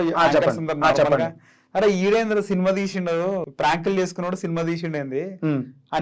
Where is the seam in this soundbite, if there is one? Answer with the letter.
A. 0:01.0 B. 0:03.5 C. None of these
B